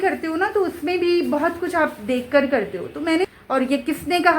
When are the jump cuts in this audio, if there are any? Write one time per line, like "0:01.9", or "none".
0:03.3